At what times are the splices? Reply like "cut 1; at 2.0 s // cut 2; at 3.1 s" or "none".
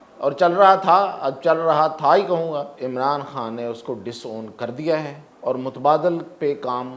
cut 1; at 2.7 s // cut 2; at 5.2 s